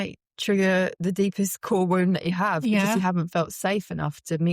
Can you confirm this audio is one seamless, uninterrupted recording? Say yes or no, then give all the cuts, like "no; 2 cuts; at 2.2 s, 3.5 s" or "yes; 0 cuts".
no; 1 cut; at 1.0 s